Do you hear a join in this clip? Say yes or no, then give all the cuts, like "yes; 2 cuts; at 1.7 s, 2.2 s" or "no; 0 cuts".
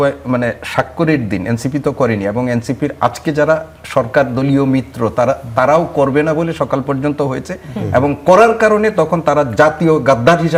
no; 0 cuts